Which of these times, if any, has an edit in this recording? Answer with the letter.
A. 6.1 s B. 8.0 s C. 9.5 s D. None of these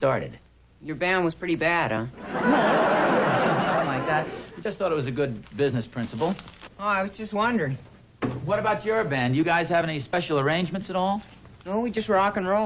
A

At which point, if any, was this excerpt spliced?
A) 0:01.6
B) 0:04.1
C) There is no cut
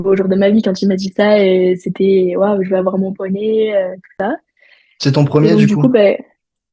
C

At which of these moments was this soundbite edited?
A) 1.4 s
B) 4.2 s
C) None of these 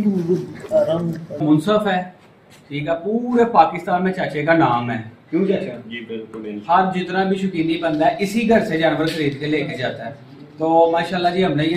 A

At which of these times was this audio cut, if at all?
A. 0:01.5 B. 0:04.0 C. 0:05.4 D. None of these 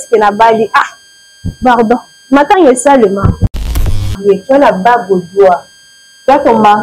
B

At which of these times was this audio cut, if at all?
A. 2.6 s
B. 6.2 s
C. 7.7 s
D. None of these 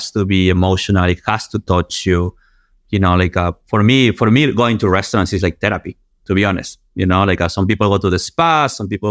D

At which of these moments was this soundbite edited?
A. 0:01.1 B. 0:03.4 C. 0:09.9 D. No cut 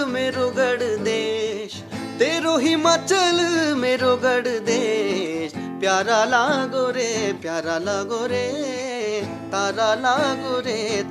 D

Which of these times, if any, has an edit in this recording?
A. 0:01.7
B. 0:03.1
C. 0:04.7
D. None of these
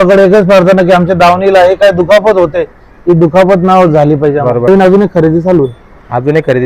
C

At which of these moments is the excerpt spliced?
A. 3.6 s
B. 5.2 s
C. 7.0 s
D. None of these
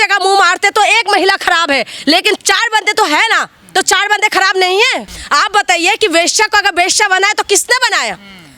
B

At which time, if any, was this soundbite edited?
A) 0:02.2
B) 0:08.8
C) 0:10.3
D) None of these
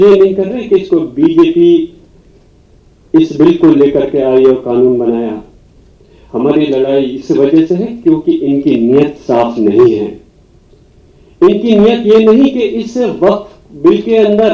D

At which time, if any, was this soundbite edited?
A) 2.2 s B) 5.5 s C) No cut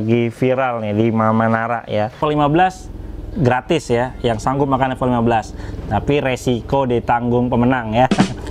A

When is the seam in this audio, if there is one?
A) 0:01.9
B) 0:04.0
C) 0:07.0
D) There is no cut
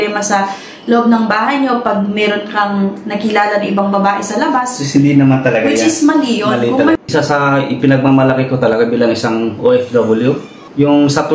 C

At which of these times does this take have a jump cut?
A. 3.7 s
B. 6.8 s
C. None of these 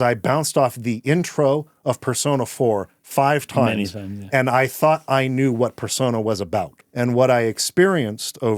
B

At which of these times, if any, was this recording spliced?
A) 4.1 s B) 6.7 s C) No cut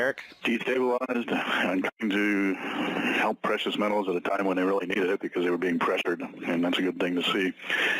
A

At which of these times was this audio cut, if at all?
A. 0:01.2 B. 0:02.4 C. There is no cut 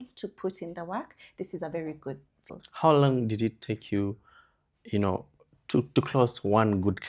B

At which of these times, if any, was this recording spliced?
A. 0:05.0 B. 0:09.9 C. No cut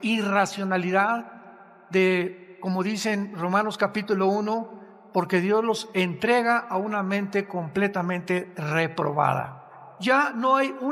B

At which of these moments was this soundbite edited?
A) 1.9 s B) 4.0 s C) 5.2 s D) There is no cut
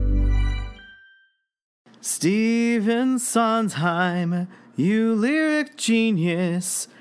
A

